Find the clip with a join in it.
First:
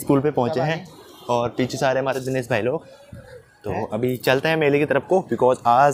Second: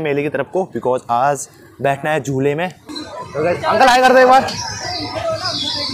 second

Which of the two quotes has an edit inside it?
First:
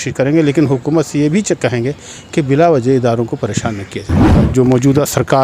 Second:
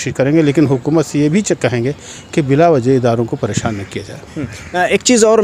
first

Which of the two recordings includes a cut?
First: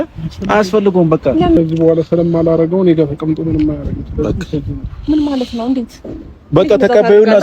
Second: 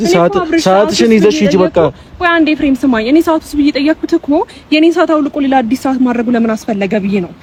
first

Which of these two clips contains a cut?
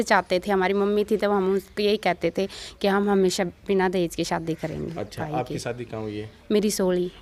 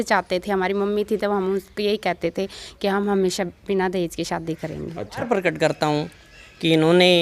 second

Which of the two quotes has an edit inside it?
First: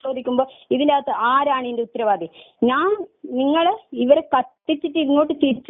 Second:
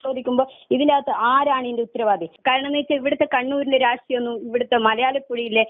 second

